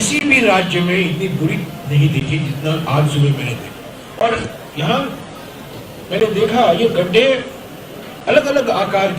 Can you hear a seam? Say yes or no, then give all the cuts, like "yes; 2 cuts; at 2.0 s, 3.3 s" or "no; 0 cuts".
yes; 1 cut; at 4.0 s